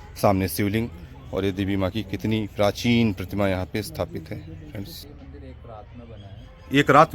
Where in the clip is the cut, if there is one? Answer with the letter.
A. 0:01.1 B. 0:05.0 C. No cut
B